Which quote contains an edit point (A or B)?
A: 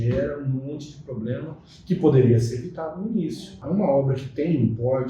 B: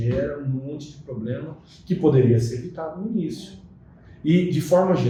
A